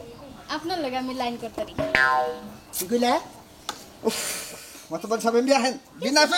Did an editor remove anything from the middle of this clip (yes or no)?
no